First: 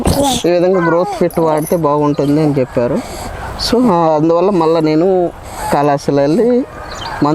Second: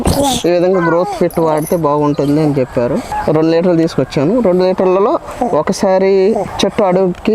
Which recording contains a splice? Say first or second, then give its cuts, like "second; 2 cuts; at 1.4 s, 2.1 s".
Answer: second; 2 cuts; at 3.1 s, 6.5 s